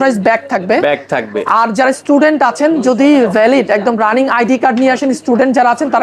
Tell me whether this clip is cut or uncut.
uncut